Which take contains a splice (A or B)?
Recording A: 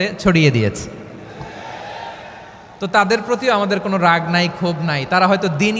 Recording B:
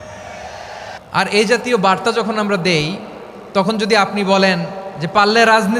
B